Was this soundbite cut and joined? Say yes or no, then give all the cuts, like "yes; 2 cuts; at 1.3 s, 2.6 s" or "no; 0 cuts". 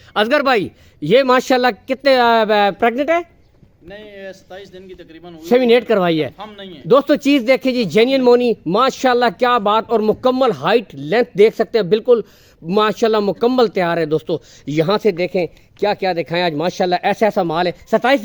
no; 0 cuts